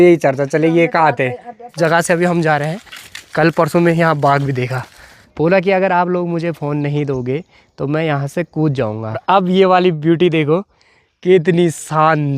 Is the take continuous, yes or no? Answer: no